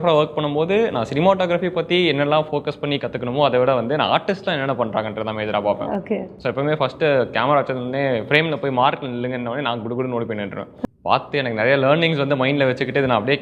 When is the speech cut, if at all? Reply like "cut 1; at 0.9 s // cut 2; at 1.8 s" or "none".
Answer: cut 1; at 10.7 s